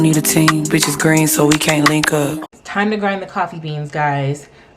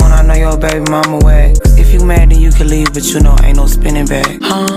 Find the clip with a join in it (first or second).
first